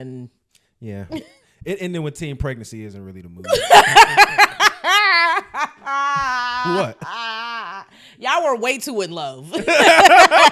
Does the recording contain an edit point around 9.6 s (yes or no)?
no